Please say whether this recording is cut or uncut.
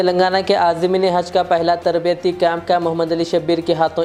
uncut